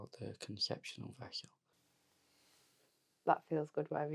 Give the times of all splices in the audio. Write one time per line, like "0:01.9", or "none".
0:01.7